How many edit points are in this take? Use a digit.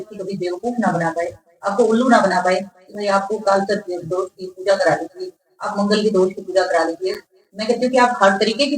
0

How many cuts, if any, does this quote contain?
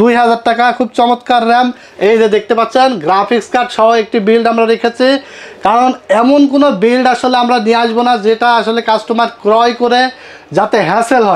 1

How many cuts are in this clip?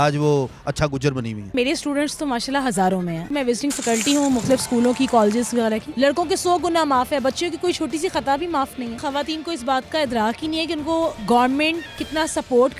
5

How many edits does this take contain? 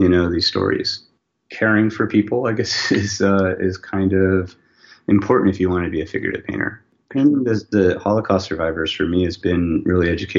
1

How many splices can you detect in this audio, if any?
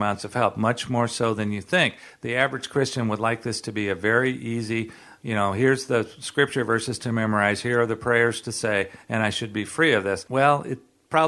1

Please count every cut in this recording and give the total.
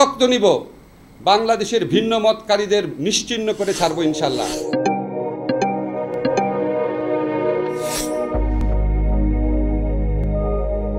0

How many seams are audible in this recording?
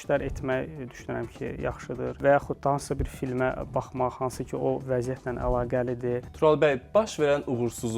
2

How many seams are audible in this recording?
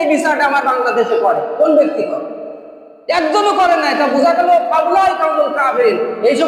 0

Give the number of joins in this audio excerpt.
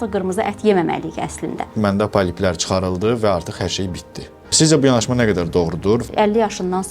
3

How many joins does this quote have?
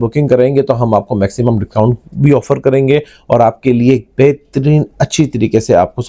0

